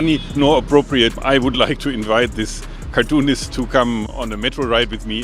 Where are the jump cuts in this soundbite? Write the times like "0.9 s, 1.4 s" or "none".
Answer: 1.2 s